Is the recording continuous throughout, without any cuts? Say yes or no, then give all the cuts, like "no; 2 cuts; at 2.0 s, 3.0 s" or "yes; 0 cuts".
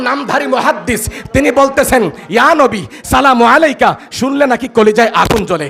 yes; 0 cuts